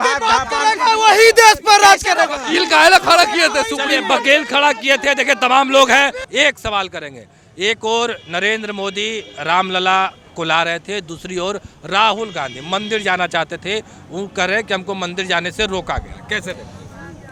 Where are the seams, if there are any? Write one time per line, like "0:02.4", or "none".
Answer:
none